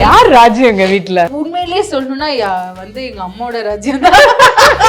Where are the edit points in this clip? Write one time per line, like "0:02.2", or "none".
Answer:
0:01.3